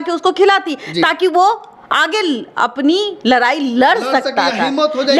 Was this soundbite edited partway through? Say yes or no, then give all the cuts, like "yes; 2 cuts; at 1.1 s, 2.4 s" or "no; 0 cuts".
no; 0 cuts